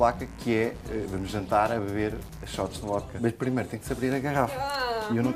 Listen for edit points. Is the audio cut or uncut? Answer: cut